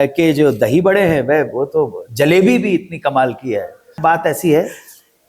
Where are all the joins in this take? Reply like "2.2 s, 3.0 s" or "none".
4.0 s